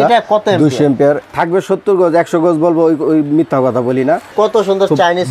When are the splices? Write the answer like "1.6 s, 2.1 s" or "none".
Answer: 1.2 s, 4.3 s